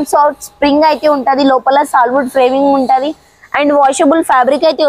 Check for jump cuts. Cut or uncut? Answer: uncut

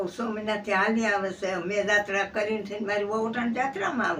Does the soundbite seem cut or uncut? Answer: uncut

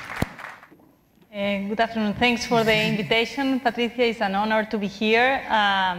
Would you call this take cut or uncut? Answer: cut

